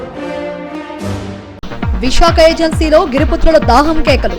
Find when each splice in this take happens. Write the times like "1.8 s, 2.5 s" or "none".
1.2 s